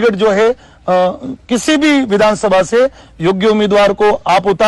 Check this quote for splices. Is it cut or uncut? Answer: uncut